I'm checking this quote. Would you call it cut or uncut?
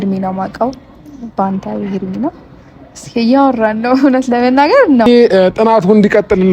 cut